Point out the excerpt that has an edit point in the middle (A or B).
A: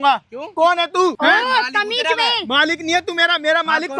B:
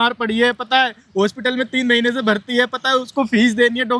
A